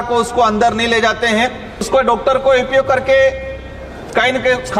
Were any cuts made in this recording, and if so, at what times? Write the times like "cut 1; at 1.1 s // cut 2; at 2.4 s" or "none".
cut 1; at 1.9 s